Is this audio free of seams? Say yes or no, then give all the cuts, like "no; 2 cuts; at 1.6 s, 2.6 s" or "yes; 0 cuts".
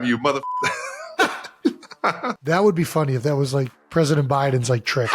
no; 3 cuts; at 1.1 s, 2.4 s, 3.8 s